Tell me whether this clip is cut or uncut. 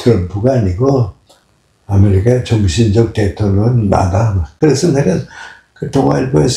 cut